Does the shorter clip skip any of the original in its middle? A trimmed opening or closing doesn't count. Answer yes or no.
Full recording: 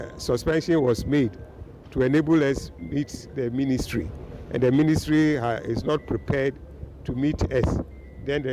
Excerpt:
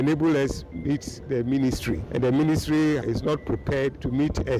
yes